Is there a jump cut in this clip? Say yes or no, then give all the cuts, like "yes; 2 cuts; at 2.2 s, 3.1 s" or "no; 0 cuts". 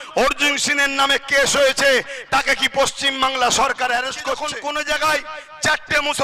yes; 1 cut; at 4.5 s